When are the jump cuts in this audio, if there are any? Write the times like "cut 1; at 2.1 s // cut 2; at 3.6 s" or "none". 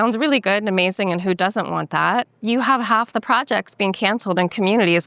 cut 1; at 2.3 s